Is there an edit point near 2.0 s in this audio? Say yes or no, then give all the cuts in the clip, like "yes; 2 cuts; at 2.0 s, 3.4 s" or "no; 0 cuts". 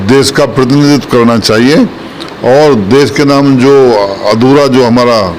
no; 0 cuts